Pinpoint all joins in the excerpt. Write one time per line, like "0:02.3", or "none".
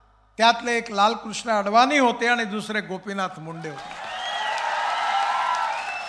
none